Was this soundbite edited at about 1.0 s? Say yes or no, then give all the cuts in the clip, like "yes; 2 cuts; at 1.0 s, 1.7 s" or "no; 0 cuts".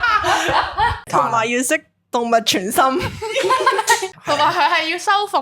yes; 2 cuts; at 1.0 s, 4.1 s